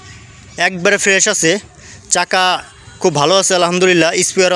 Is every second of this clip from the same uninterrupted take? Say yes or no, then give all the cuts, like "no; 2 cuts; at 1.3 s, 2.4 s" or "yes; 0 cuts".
yes; 0 cuts